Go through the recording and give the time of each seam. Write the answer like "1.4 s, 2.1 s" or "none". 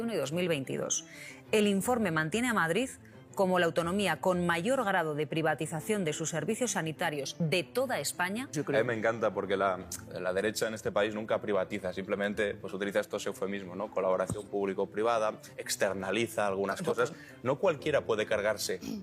7.3 s, 8.5 s, 17.2 s